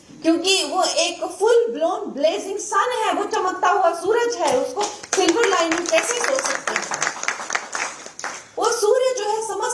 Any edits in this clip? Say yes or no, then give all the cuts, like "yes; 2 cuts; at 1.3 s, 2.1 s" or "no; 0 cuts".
no; 0 cuts